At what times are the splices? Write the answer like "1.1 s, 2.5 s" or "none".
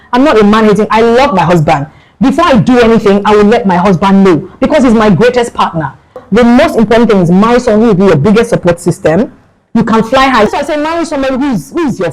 6.2 s, 10.5 s